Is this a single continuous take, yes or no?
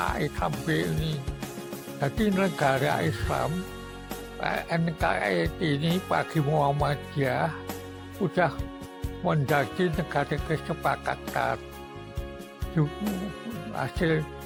yes